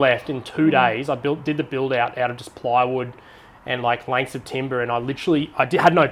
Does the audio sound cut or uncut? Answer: uncut